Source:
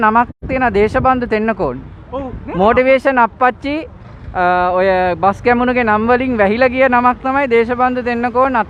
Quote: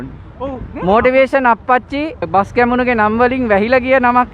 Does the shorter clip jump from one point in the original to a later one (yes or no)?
yes